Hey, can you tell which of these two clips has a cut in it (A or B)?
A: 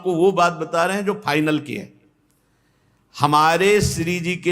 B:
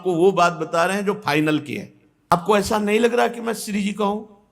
B